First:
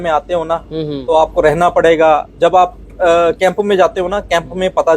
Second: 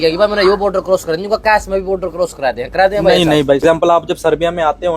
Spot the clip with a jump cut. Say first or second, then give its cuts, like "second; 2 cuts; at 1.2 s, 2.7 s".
second; 1 cut; at 3.6 s